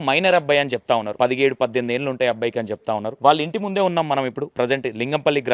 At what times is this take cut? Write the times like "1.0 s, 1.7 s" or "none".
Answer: 1.1 s, 3.1 s, 4.5 s